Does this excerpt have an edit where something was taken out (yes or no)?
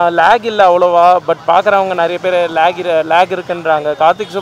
no